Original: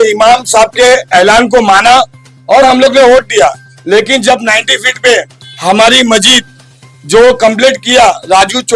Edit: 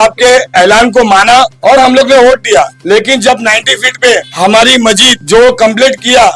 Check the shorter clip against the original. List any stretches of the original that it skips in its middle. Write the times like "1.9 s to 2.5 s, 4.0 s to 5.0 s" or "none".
2.1 s to 2.4 s, 3.6 s to 3.8 s, 5.3 s to 5.5 s, 6.4 s to 6.9 s